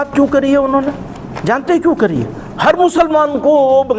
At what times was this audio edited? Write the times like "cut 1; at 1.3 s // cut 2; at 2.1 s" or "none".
none

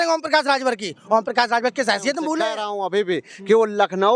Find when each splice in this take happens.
cut 1; at 2.6 s

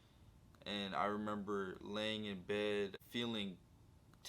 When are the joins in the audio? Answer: cut 1; at 3.0 s

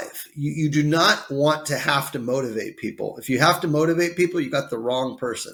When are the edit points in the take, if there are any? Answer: none

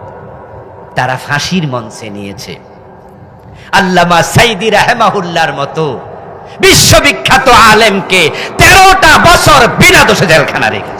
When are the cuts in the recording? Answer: none

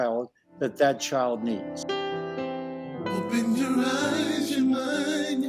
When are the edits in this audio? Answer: cut 1; at 1.7 s

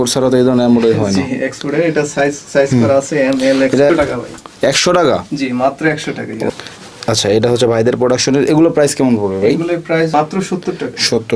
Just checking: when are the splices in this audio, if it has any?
cut 1; at 3.9 s // cut 2; at 6.5 s // cut 3; at 10.1 s

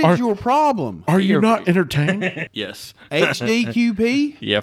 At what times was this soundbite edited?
cut 1; at 2.4 s

